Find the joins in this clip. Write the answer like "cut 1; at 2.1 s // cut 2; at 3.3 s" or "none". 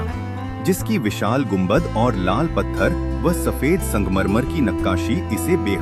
none